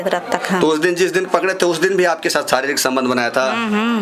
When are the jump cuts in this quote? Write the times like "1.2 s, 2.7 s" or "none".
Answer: none